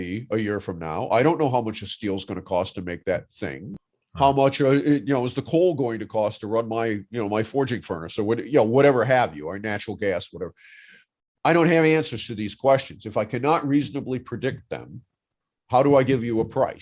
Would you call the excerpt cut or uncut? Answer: cut